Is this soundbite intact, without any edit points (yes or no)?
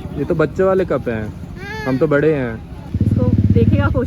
no